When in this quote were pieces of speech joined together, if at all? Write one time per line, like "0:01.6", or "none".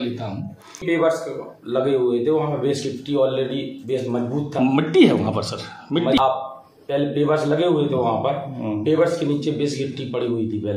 0:00.8
0:06.2

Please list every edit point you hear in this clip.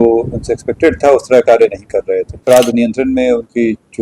0:02.3

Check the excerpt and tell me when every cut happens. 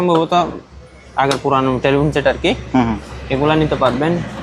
none

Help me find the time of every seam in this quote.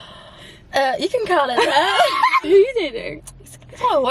0:02.4

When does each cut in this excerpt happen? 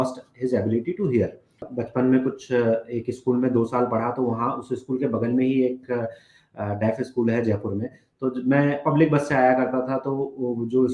0:01.7

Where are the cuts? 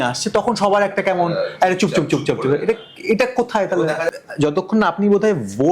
0:04.0

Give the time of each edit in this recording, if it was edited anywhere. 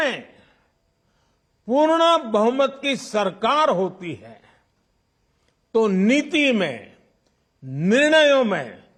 none

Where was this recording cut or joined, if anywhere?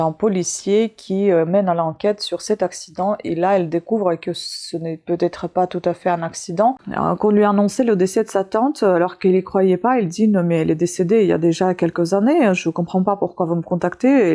0:06.8

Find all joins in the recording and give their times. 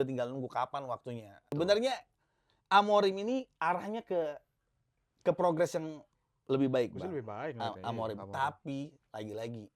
0:01.5

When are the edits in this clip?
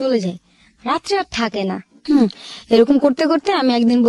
0:01.9

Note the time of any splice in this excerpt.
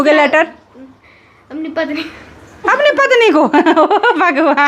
none

